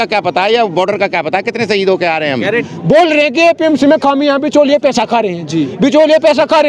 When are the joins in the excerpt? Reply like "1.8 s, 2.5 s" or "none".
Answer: 2.5 s